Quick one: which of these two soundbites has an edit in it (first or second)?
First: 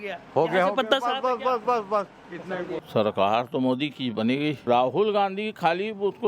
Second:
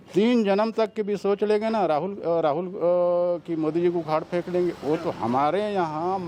first